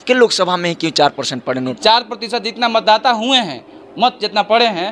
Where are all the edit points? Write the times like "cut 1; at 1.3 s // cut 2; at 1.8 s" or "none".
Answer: cut 1; at 1.8 s